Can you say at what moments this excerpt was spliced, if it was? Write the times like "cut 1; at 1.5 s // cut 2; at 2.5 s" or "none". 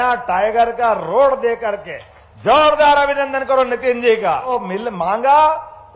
cut 1; at 4.4 s